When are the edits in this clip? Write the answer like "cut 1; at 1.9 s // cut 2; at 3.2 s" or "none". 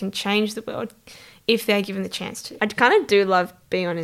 cut 1; at 2.5 s